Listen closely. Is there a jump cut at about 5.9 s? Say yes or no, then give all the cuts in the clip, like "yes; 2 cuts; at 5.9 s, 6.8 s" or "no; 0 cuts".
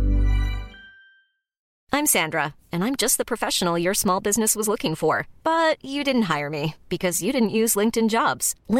no; 1 cut; at 1.7 s